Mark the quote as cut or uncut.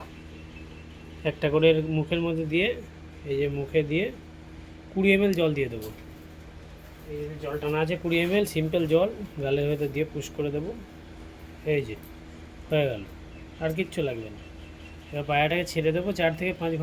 uncut